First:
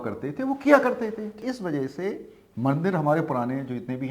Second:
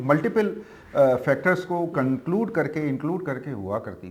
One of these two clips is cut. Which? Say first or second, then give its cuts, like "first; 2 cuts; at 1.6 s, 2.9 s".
first; 1 cut; at 1.4 s